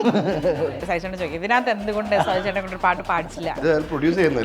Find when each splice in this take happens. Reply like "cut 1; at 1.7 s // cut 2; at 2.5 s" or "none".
cut 1; at 0.8 s // cut 2; at 3.6 s